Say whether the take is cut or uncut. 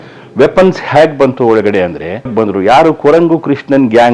cut